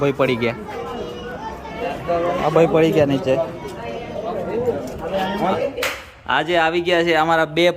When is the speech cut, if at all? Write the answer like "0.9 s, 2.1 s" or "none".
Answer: 1.8 s, 5.5 s